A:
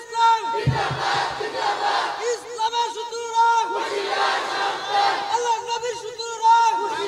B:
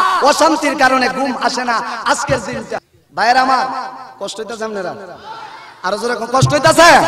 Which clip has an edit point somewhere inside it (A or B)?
B